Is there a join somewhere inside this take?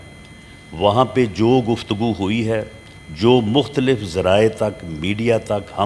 no; 0 cuts

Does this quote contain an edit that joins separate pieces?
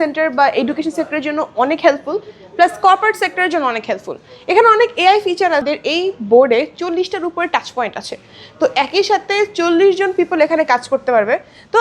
yes; 1 cut; at 5.7 s

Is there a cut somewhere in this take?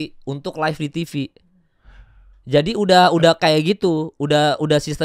no; 0 cuts

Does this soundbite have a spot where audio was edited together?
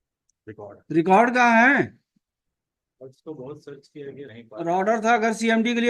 yes; 1 cut; at 4.3 s

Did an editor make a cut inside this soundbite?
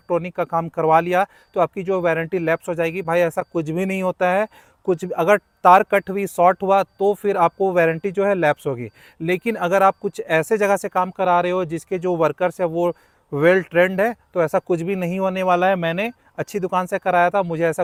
no; 0 cuts

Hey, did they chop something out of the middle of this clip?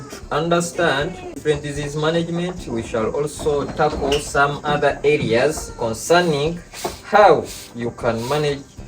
yes; 1 cut; at 1.4 s

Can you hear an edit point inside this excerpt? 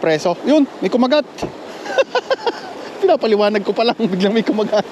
no; 0 cuts

